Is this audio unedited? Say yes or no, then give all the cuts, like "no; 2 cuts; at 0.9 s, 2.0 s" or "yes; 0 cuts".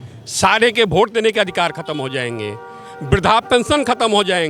yes; 0 cuts